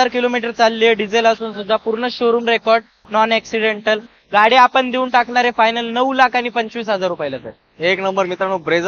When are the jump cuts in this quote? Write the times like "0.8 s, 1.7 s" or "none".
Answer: none